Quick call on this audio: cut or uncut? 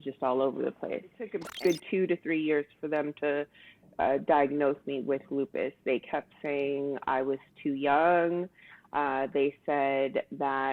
cut